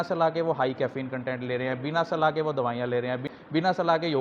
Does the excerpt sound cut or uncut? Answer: uncut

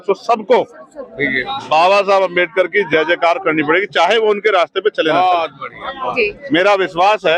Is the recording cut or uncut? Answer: uncut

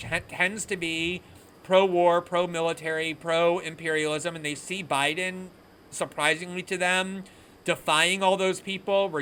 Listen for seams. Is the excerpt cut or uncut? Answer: uncut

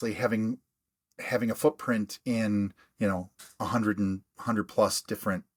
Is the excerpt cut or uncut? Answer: uncut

